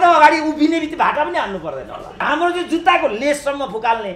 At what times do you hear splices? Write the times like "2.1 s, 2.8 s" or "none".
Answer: 2.3 s